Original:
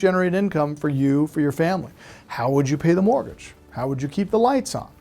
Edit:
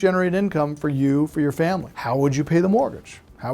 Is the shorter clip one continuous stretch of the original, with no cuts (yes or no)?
no